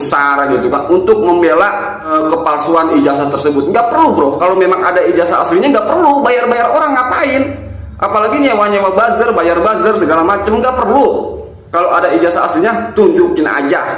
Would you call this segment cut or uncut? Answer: cut